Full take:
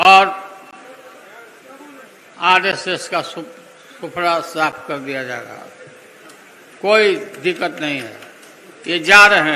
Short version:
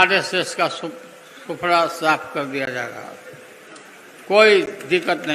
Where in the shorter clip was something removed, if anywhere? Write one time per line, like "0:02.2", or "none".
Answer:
none

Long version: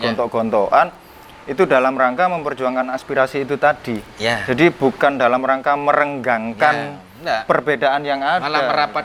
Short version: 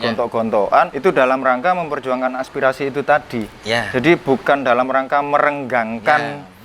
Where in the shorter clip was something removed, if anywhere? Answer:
0:00.9

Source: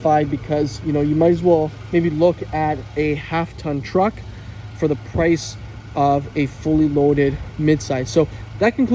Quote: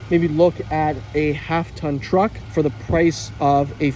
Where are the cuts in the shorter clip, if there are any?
0:02.9

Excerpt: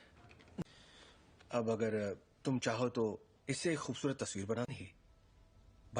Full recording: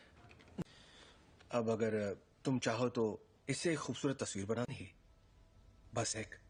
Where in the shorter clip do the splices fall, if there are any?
none

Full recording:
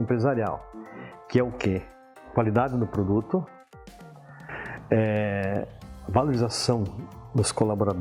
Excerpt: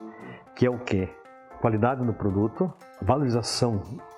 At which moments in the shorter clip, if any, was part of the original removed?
0:02.9

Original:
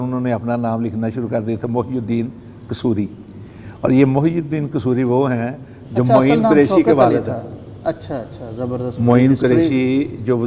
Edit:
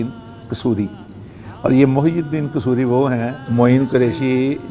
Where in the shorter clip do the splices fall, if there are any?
0:03.4

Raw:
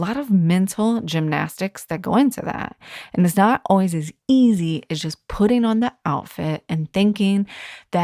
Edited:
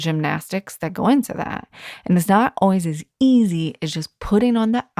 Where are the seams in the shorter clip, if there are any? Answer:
none

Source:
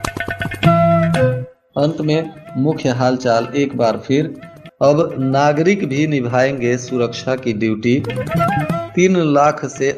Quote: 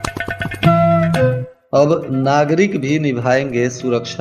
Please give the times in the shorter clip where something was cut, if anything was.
0:01.5

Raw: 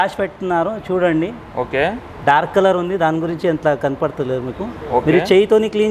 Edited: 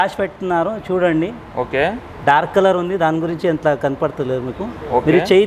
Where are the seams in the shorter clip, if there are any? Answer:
none

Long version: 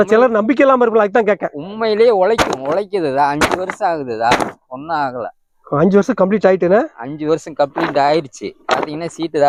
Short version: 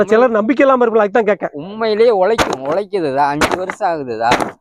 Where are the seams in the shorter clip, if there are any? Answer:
none

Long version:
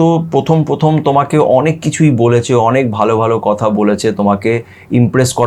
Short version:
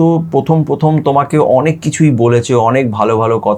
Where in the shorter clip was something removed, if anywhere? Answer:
none

